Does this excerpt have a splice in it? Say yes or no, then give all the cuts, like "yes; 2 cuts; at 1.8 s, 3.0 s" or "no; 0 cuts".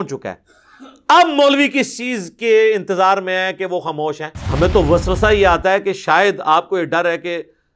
yes; 1 cut; at 4.4 s